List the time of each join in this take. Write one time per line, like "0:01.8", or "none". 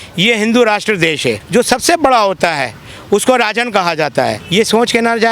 0:01.4
0:04.4